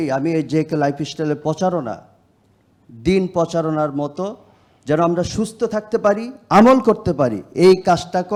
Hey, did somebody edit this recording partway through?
no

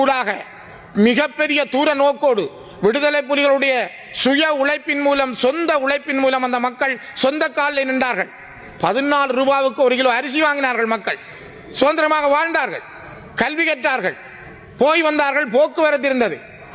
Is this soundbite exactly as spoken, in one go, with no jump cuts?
yes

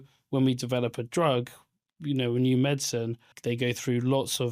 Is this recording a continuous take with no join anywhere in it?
no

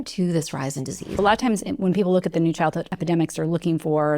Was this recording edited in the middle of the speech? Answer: yes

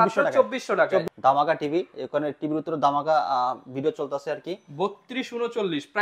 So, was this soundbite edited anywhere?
yes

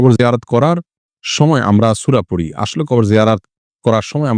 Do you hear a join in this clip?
no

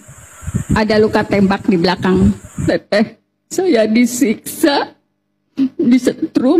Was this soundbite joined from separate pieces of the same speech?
yes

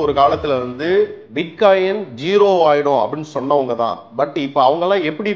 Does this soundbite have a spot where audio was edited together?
no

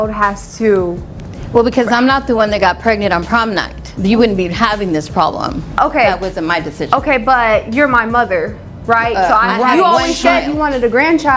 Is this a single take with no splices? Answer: yes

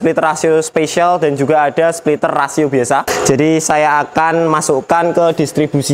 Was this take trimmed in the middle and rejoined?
no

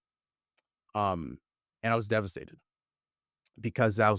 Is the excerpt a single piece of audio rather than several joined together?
yes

